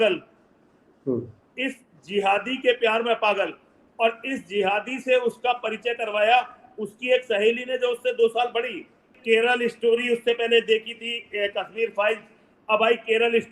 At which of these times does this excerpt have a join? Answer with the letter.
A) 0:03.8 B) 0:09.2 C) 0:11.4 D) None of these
B